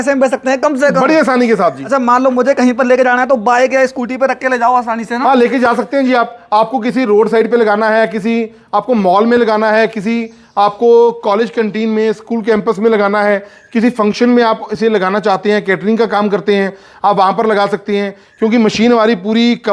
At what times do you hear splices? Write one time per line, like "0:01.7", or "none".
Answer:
none